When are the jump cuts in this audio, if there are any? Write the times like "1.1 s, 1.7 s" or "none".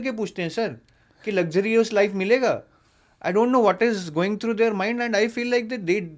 none